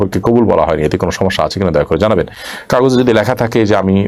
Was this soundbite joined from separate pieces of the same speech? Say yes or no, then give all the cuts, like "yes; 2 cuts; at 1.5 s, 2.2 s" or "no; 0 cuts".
no; 0 cuts